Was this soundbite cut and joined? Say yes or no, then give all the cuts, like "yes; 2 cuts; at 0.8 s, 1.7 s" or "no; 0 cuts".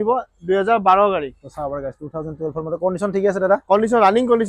no; 0 cuts